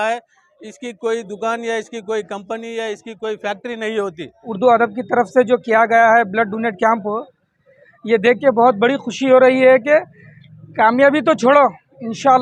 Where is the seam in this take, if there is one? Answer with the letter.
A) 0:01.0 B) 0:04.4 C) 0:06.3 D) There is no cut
B